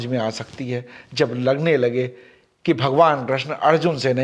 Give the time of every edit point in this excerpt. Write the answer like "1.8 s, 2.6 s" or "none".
none